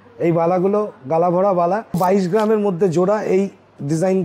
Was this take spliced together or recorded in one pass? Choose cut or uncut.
cut